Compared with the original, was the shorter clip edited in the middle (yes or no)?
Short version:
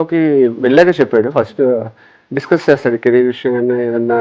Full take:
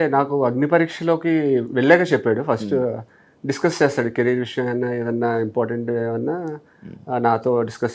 no